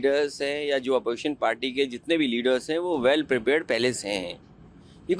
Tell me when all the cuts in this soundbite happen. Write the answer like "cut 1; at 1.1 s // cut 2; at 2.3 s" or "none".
none